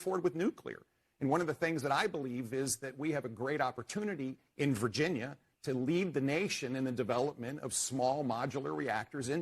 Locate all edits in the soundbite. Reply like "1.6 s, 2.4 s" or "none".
1.0 s